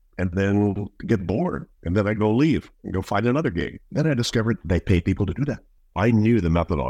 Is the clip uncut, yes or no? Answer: no